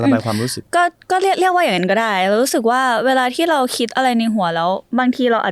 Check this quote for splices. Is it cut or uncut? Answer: uncut